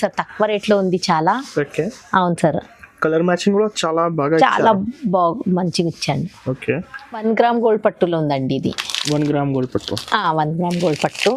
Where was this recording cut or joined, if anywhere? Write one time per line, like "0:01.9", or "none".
0:07.0